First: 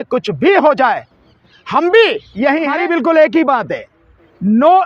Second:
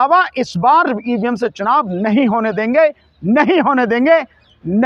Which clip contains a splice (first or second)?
first